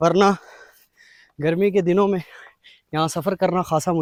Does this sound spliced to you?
no; 0 cuts

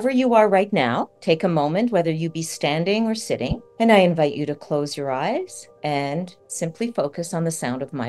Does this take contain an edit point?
yes; 4 cuts; at 1.1 s, 3.6 s, 5.6 s, 6.4 s

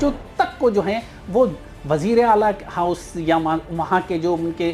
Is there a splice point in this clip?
no; 0 cuts

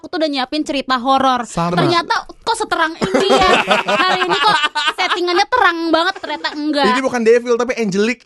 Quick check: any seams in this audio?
no; 0 cuts

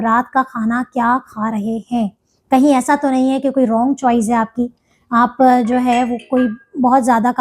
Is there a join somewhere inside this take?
no; 0 cuts

